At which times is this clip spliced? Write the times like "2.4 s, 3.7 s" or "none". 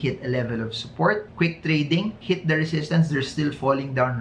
none